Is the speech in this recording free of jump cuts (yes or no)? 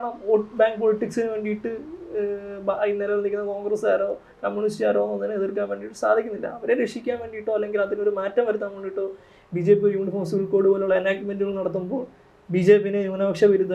yes